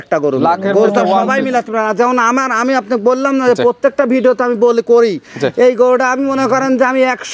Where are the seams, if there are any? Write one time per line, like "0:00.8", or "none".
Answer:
none